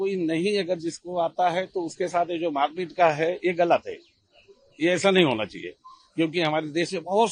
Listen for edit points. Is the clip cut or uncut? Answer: uncut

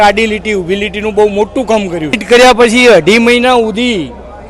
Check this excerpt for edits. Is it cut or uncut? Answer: cut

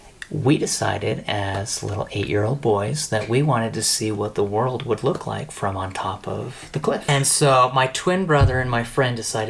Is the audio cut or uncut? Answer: cut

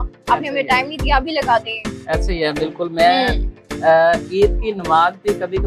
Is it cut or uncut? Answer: uncut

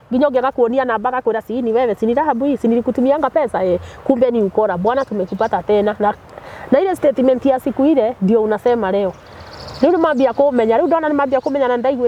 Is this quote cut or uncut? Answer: uncut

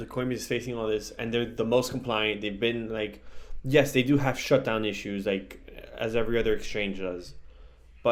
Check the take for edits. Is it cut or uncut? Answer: uncut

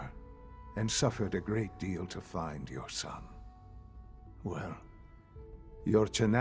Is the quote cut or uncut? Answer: uncut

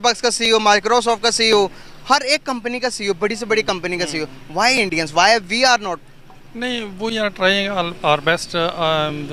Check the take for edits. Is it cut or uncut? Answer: uncut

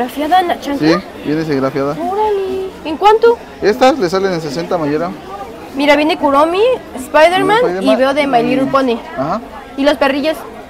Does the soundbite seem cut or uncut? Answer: uncut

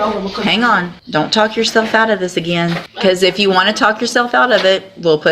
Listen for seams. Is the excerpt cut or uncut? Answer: cut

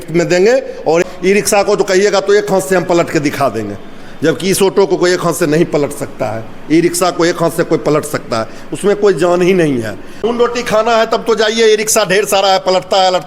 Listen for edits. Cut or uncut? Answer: cut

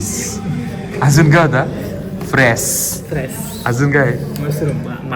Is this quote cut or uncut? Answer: uncut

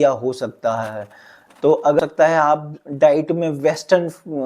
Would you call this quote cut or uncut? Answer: cut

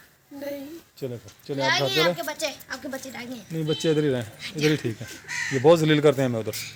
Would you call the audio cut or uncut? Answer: uncut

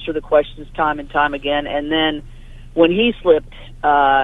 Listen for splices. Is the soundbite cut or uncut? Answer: uncut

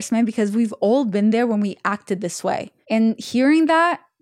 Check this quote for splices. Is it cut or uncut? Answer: cut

